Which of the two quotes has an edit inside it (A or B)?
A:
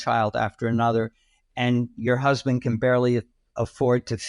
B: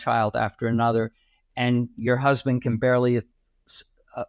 A